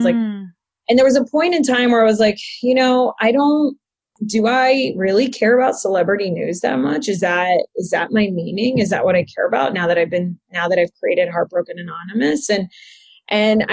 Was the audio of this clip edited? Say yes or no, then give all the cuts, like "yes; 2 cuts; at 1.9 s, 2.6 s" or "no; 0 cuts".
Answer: yes; 1 cut; at 4.2 s